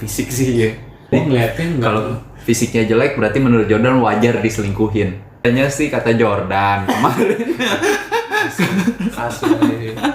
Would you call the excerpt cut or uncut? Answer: cut